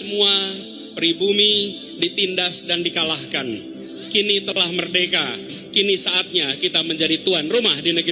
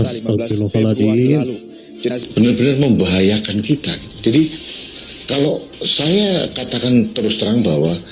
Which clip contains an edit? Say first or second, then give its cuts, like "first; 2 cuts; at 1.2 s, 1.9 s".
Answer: second; 1 cut; at 2.2 s